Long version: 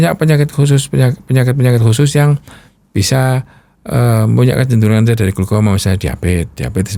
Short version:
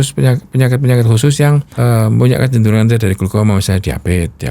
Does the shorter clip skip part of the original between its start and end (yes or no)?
yes